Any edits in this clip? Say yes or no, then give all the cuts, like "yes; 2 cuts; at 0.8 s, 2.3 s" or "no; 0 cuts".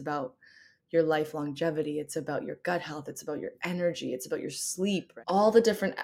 yes; 1 cut; at 5.1 s